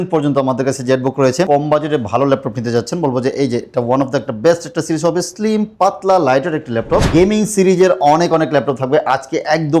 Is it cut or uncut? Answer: cut